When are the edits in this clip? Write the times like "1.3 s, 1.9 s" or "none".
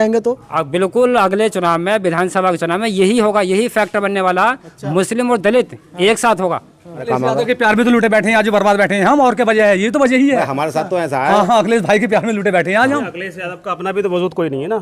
7.1 s